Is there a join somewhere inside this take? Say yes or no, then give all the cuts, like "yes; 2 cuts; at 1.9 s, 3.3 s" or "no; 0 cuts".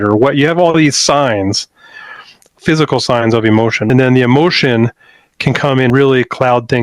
yes; 3 cuts; at 2.6 s, 3.9 s, 5.9 s